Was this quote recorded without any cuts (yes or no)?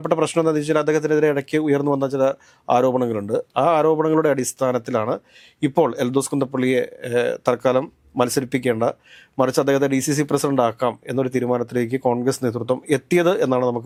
yes